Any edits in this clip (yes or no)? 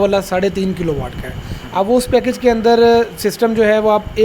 no